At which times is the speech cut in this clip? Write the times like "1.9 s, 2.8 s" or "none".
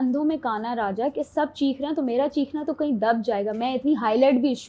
none

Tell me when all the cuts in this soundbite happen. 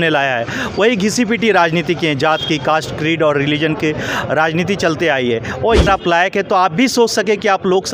5.9 s

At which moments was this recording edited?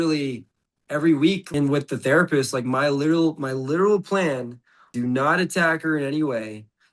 1.4 s, 4.9 s

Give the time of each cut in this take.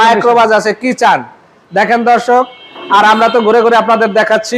none

